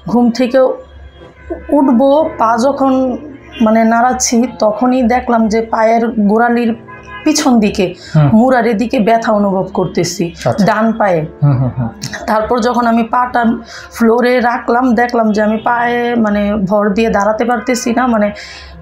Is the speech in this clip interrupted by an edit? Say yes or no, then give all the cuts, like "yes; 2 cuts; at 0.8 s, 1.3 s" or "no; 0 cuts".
no; 0 cuts